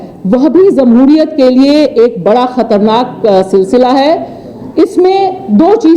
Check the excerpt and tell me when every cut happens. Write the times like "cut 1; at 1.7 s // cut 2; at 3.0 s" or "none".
none